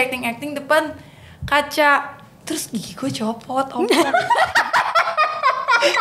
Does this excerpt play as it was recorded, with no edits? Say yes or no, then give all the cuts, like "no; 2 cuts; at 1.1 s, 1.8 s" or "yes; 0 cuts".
yes; 0 cuts